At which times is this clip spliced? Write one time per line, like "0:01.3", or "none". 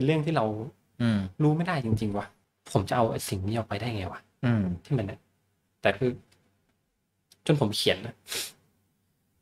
0:02.4